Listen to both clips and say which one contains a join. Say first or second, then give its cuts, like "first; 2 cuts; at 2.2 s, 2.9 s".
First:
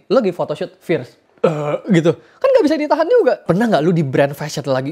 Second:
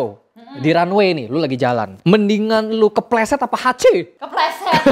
first; 2 cuts; at 1.2 s, 3.4 s